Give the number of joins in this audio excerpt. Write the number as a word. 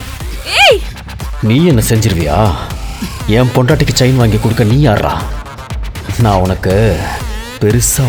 zero